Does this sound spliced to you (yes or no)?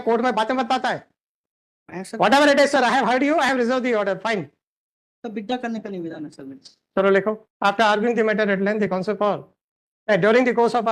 no